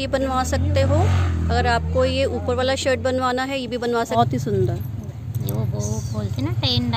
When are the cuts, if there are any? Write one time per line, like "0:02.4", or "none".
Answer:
0:04.1

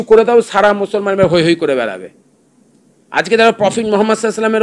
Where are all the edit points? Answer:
none

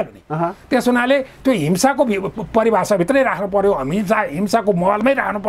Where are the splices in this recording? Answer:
none

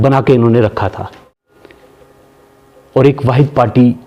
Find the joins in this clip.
0:01.2

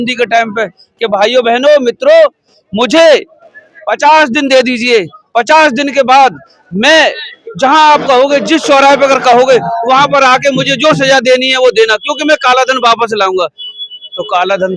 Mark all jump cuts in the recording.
none

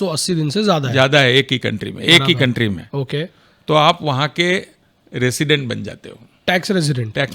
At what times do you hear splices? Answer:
none

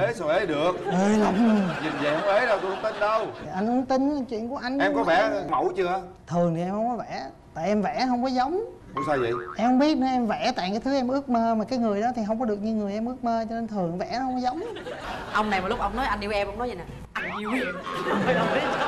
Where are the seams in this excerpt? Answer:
0:15.0

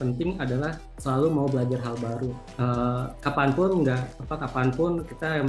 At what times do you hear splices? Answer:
0:00.9
0:02.4

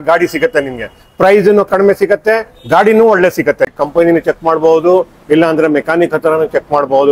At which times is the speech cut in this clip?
0:03.7

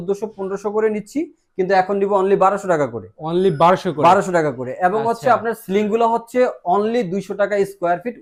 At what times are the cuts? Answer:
none

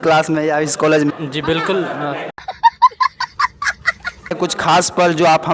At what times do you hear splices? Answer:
0:01.1
0:02.3
0:04.4

